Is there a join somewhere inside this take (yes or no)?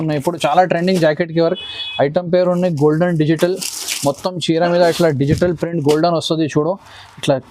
no